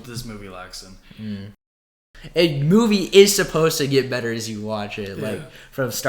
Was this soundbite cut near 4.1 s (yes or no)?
no